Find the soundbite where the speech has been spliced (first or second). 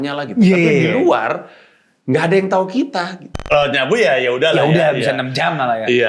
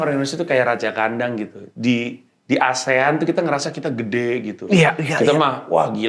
first